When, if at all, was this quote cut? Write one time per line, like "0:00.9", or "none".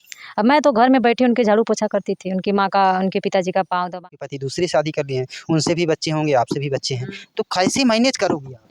0:04.1